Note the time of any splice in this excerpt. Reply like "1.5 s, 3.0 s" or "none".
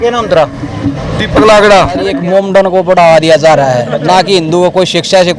2.2 s